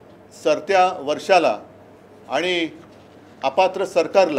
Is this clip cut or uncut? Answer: uncut